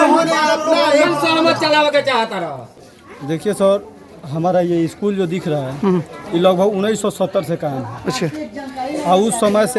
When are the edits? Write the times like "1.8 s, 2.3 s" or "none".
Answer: 2.6 s